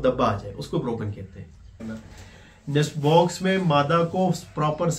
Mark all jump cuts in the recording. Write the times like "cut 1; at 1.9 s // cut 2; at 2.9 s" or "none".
cut 1; at 1.8 s